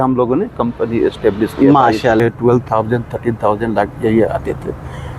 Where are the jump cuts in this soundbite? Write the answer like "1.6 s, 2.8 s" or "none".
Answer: 2.2 s